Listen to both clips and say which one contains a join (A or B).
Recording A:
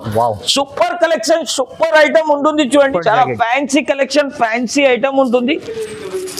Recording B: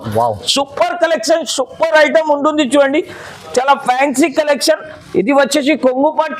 A